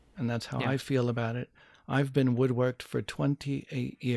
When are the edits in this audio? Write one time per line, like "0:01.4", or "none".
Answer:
none